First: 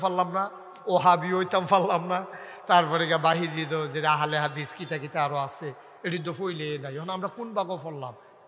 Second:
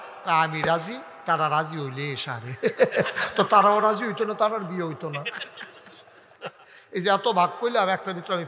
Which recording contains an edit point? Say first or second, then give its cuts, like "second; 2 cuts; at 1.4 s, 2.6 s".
second; 1 cut; at 6.4 s